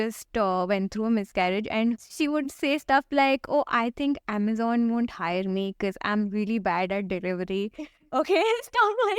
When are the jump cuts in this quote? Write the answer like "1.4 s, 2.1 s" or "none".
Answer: 2.0 s